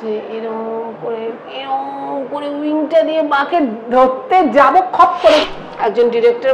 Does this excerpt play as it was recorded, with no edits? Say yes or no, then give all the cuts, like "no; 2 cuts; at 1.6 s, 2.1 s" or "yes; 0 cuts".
no; 1 cut; at 5.4 s